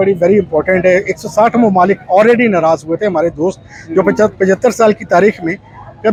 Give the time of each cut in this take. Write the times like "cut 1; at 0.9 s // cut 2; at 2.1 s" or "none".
none